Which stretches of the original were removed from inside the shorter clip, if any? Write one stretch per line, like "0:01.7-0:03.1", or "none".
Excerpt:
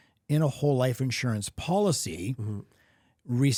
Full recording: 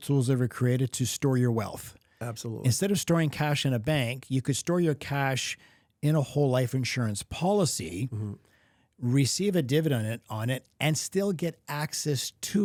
none